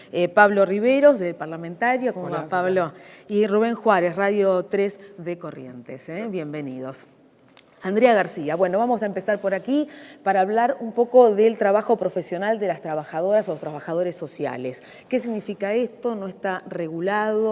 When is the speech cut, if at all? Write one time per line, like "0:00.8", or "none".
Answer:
0:12.6